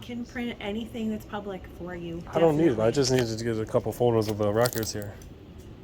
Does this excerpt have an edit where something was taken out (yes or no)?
no